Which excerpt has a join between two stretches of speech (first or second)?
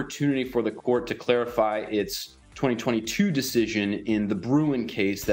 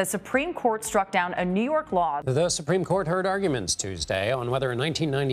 second